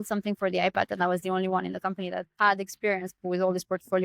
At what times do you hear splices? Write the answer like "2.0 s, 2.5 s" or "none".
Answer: 0.9 s, 2.3 s, 3.2 s